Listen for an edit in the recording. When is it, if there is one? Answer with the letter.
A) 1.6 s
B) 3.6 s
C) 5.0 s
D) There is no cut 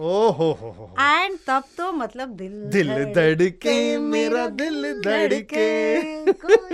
D